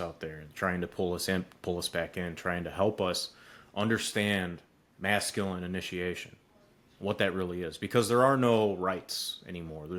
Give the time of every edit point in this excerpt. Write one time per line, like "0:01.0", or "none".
none